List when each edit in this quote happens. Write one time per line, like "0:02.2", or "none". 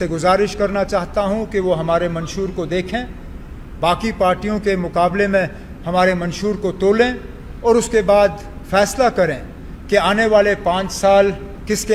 none